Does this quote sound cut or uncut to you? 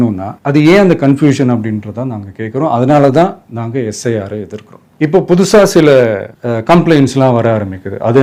uncut